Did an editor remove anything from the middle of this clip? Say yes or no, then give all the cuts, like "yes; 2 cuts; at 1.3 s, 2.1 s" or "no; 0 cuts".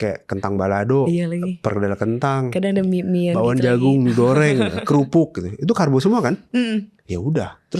no; 0 cuts